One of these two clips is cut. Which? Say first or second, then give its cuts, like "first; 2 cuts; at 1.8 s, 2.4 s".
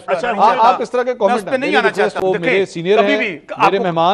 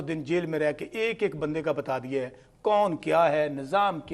first; 1 cut; at 2.2 s